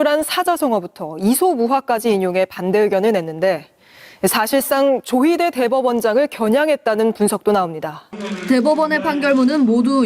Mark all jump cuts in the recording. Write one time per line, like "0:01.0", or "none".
none